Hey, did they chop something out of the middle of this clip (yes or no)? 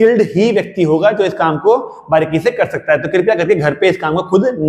no